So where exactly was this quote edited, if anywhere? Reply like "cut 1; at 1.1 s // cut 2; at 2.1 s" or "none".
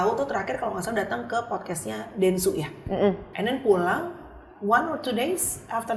cut 1; at 3.3 s